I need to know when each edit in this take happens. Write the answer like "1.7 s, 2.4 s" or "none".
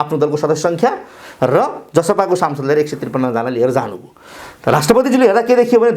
none